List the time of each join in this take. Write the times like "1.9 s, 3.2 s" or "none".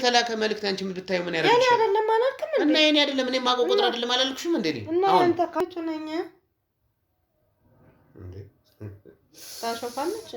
5.6 s